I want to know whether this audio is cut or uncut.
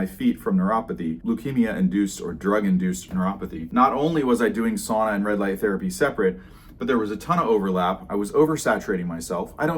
cut